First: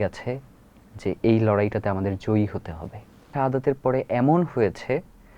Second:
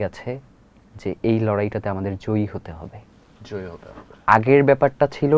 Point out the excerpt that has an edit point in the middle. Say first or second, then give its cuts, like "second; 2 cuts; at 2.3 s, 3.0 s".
first; 1 cut; at 3.3 s